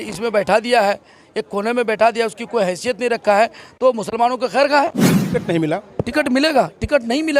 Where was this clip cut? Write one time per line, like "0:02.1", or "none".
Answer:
0:05.1